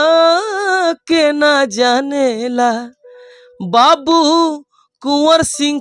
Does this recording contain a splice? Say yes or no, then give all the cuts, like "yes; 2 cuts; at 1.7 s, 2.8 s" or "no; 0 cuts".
no; 0 cuts